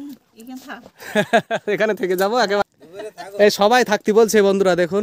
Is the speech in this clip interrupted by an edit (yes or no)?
yes